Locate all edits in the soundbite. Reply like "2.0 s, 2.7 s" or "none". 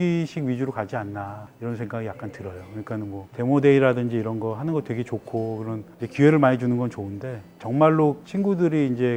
none